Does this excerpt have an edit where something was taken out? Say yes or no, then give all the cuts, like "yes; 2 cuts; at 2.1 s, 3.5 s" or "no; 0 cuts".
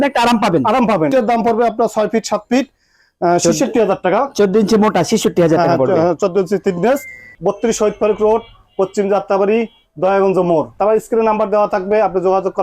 yes; 3 cuts; at 1.1 s, 7.2 s, 10.7 s